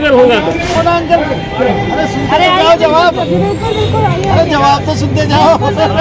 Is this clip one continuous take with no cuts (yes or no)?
yes